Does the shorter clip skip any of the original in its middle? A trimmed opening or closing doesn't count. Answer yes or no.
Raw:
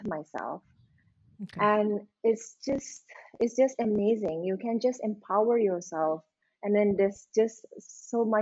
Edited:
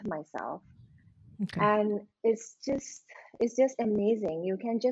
no